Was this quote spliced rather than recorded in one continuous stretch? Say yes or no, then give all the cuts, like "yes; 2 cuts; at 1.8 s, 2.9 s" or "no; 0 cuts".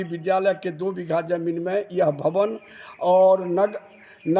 no; 0 cuts